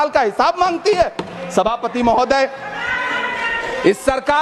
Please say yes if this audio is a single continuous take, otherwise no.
yes